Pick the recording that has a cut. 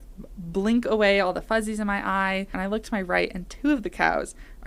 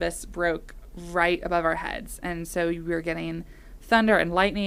first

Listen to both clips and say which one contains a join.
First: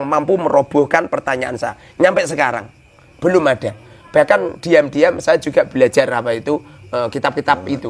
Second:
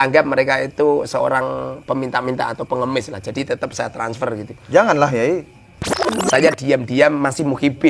second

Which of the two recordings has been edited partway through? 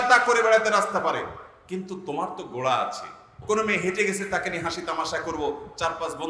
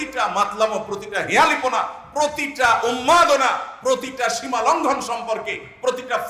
first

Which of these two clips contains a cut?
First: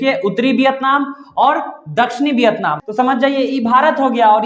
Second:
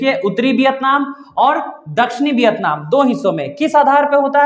first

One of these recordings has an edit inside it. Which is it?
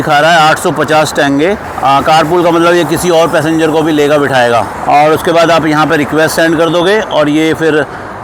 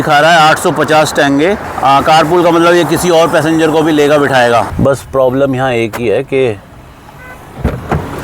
second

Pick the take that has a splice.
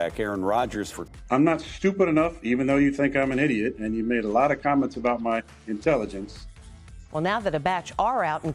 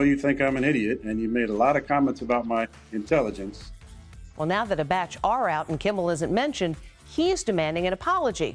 first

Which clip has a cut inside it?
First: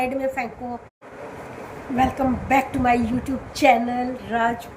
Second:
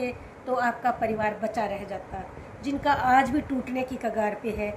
first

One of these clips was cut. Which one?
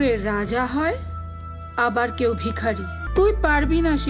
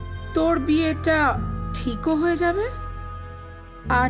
first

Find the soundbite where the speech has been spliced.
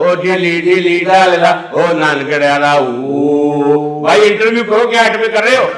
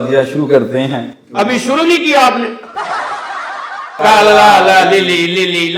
second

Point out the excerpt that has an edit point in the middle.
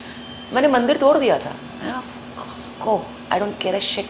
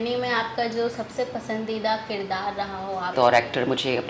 second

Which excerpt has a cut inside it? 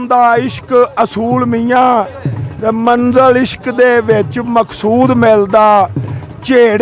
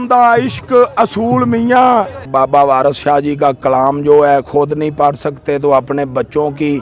second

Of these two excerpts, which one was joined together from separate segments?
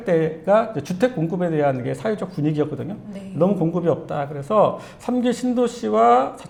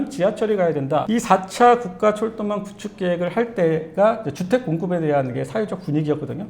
second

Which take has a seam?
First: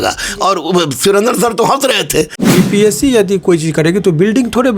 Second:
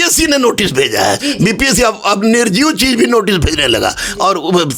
first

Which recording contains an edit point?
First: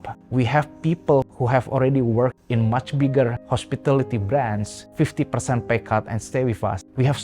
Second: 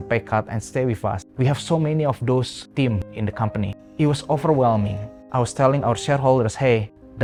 first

